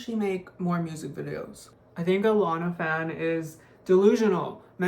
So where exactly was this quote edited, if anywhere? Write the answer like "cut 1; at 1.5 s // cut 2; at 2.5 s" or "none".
cut 1; at 1.6 s